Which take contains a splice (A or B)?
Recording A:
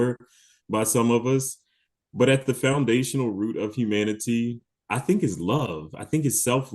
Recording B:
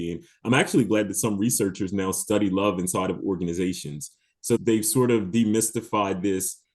B